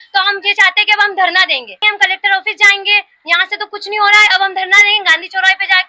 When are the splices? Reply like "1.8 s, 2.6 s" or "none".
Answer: 1.8 s